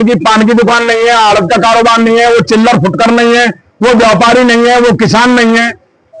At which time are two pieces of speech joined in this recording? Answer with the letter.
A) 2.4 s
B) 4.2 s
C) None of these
C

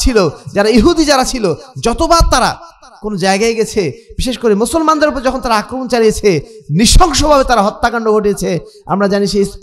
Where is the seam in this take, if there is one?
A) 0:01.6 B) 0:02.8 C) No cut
C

